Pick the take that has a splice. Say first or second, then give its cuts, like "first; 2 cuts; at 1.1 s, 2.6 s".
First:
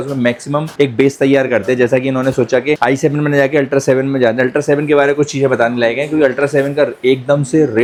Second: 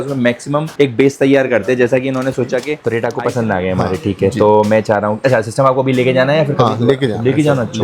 second; 1 cut; at 2.7 s